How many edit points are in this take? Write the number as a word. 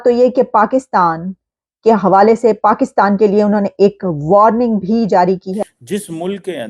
one